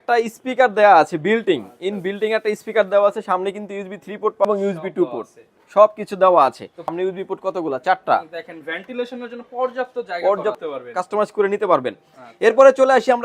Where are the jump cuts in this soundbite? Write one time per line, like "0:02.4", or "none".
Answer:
0:04.4
0:06.9
0:10.6